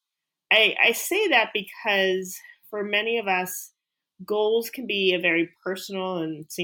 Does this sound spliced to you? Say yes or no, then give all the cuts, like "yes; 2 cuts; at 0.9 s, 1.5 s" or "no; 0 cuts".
no; 0 cuts